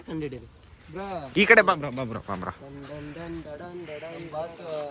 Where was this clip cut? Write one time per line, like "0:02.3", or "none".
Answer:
none